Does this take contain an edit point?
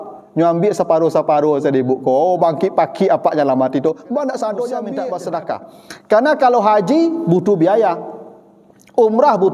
yes; 1 cut; at 4.9 s

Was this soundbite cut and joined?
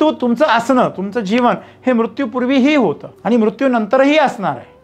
yes; 1 cut; at 3.1 s

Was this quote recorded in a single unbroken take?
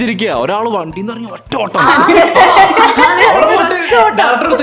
yes; 0 cuts

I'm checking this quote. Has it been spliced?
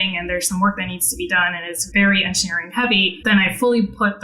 yes; 2 cuts; at 1.7 s, 3.1 s

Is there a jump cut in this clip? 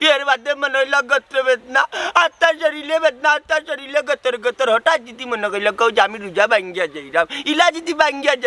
no; 0 cuts

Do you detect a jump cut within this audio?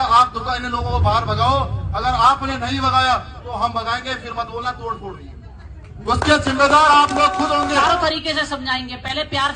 no; 0 cuts

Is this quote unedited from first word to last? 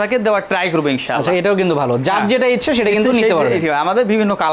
yes; 0 cuts

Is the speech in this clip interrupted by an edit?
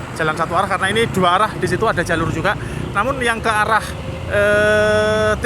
no; 0 cuts

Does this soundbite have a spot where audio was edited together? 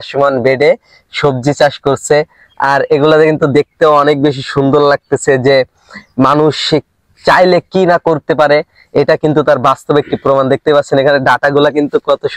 no; 0 cuts

